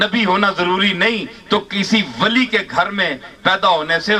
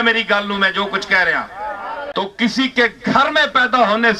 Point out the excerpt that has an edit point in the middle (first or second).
second